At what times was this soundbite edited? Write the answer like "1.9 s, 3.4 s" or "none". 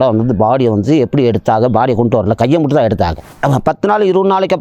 3.3 s